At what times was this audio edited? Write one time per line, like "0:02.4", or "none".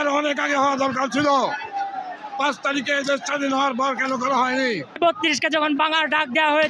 0:05.0